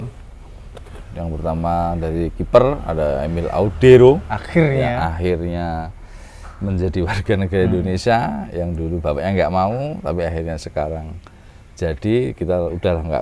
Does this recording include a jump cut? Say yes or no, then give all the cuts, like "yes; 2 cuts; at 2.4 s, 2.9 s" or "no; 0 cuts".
no; 0 cuts